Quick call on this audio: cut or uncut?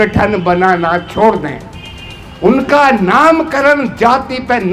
uncut